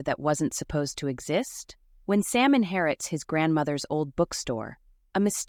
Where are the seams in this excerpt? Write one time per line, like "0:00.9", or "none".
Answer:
none